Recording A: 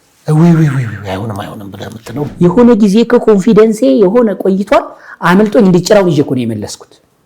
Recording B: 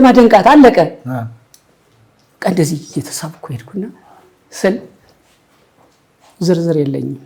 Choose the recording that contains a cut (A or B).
A